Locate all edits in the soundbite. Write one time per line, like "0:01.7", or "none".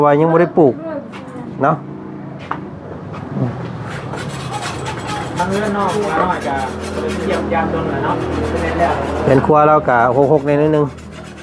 none